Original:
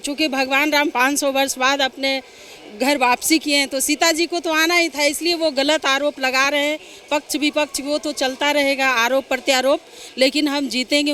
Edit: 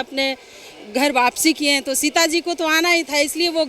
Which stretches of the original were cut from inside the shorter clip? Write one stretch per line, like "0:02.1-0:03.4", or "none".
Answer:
none